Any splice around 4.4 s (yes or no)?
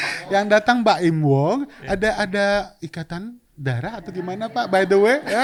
no